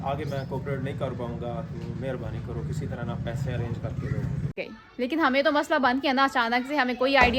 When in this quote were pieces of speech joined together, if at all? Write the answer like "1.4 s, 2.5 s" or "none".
4.6 s